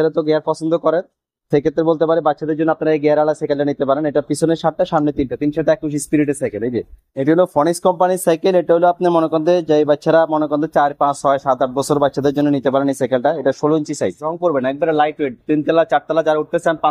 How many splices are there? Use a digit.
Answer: 2